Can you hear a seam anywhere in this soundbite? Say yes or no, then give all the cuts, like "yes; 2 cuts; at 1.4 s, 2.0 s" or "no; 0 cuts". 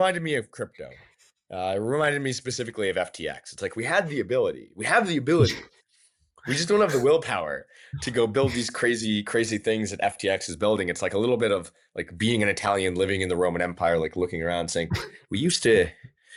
no; 0 cuts